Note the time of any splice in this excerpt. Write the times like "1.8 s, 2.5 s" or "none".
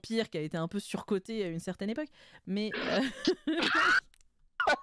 none